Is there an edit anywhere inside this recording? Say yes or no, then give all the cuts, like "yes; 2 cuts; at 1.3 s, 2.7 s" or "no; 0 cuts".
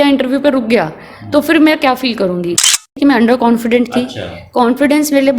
yes; 1 cut; at 2.8 s